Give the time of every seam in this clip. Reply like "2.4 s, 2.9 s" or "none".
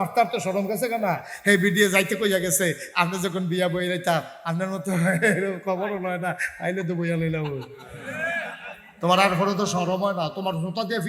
none